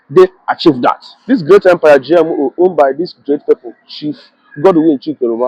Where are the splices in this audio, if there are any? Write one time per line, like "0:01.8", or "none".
0:01.2